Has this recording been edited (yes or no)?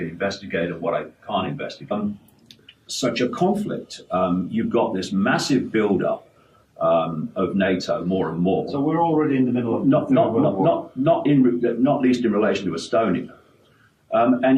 no